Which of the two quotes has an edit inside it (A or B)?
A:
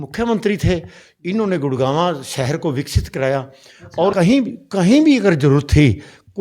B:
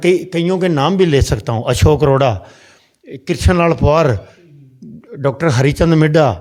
A